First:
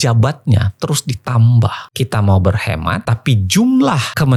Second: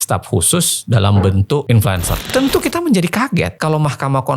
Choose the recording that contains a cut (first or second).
second